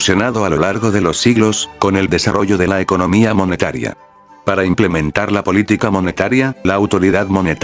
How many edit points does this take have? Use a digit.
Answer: 2